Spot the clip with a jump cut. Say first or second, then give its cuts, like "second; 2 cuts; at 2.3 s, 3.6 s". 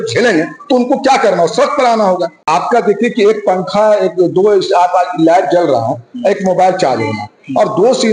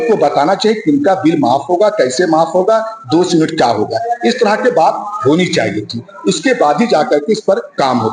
first; 1 cut; at 2.5 s